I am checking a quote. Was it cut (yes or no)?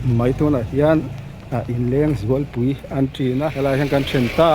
yes